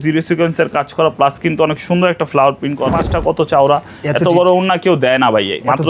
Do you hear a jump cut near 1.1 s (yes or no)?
no